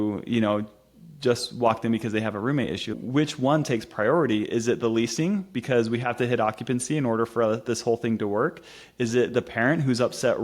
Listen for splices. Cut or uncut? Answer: cut